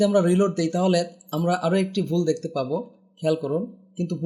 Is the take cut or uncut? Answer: uncut